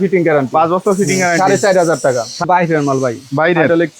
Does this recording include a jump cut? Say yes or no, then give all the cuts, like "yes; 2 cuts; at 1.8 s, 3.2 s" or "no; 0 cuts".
yes; 1 cut; at 2.5 s